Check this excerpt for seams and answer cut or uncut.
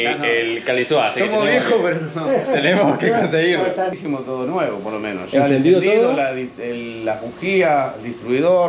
cut